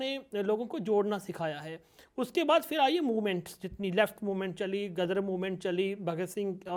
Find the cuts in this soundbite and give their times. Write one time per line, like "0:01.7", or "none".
none